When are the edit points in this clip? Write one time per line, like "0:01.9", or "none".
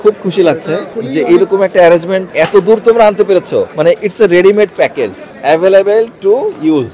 0:00.9
0:02.2
0:03.7
0:05.2